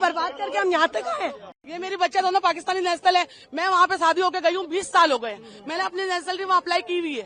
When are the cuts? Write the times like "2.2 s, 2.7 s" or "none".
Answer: 1.6 s